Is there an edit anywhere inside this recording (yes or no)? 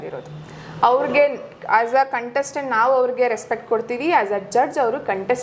no